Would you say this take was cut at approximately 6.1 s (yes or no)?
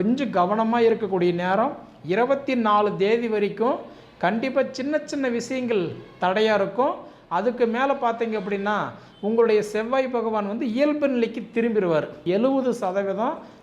no